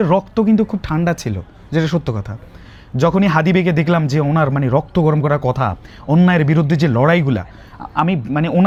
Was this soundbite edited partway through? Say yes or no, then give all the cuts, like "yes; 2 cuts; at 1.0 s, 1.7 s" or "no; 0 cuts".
no; 0 cuts